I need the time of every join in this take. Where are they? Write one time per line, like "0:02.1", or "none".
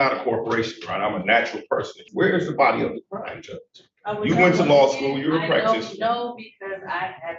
0:02.0